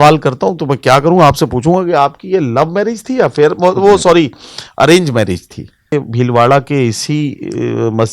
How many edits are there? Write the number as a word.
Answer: one